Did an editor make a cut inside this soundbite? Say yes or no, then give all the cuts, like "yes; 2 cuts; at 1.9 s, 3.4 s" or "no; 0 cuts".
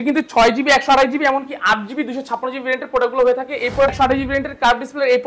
yes; 1 cut; at 3.9 s